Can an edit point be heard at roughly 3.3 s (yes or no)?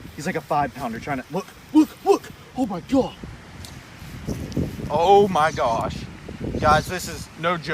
yes